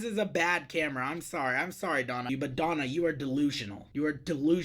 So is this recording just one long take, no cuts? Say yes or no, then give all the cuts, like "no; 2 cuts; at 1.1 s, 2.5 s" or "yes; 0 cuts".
no; 1 cut; at 2.3 s